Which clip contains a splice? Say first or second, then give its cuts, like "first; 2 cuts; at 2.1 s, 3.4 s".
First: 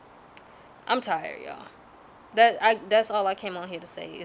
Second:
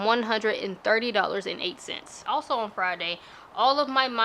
second; 1 cut; at 2.1 s